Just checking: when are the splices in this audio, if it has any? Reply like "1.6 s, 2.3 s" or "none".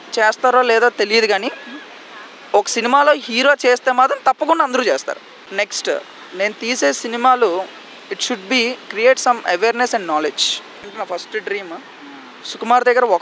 5.2 s, 10.7 s